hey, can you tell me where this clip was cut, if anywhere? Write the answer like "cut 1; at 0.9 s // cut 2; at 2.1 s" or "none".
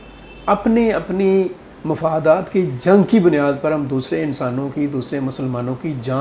none